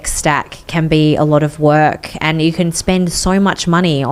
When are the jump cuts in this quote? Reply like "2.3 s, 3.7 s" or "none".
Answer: none